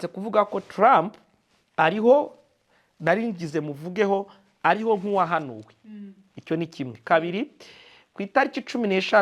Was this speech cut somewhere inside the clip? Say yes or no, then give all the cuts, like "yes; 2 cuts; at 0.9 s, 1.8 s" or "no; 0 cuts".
no; 0 cuts